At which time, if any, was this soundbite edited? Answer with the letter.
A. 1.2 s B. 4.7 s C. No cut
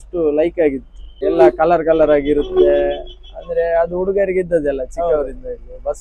A